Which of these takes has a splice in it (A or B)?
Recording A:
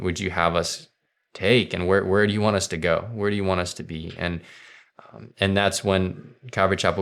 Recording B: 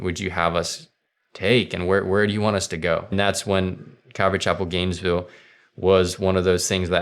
B